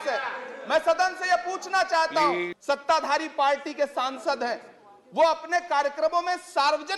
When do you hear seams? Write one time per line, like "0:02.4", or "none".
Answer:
0:02.5